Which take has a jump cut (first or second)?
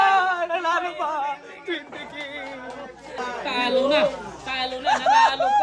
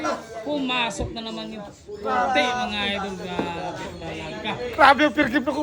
first